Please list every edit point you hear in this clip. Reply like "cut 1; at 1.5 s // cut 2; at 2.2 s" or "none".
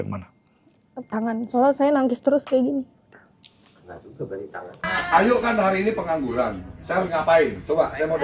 cut 1; at 4.7 s